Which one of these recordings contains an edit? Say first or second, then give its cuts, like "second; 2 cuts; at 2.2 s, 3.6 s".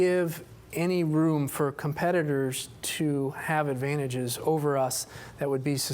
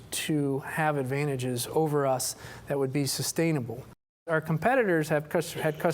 second; 1 cut; at 4.2 s